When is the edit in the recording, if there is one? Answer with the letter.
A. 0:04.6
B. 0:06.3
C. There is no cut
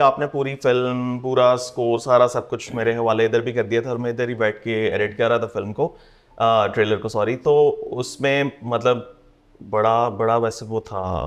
C